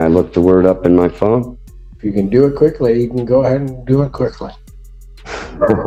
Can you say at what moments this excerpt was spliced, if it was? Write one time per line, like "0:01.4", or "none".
none